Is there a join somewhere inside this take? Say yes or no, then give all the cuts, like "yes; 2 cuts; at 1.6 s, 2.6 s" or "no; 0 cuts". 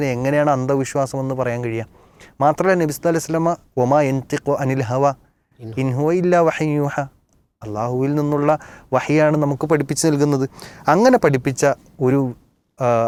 no; 0 cuts